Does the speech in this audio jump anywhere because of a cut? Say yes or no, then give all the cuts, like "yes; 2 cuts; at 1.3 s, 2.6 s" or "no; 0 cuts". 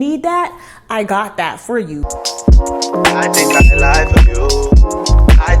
yes; 1 cut; at 2.1 s